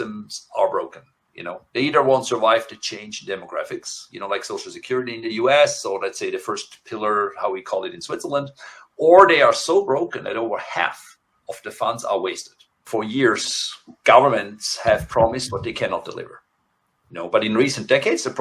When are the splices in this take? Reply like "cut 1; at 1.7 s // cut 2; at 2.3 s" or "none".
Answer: cut 1; at 12.9 s